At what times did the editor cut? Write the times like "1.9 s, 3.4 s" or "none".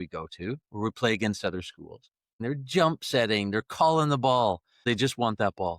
2.4 s, 4.8 s